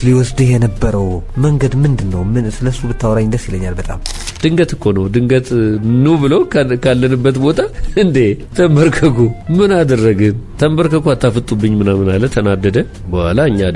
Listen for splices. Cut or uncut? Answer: cut